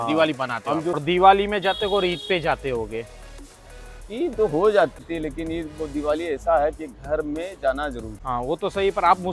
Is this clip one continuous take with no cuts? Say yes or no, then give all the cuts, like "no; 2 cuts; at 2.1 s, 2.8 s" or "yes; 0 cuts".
no; 3 cuts; at 1.0 s, 5.0 s, 8.1 s